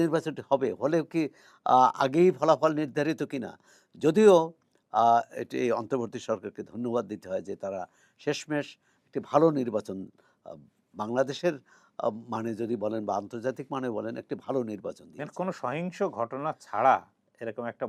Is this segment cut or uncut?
uncut